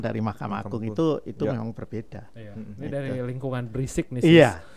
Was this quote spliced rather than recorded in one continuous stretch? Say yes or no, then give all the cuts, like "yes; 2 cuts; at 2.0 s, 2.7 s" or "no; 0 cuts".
no; 0 cuts